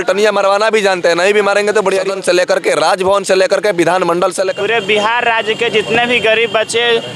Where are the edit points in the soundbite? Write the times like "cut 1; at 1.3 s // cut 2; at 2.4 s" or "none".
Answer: cut 1; at 2.1 s // cut 2; at 4.5 s